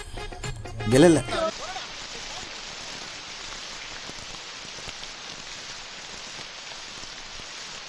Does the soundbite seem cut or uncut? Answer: cut